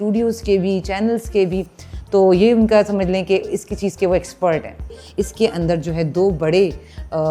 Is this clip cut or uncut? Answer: cut